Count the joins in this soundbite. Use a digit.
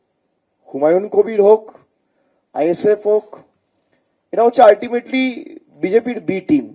0